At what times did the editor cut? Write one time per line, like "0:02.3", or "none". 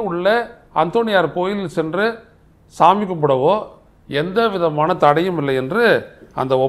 none